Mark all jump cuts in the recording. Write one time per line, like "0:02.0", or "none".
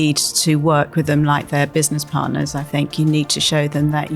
none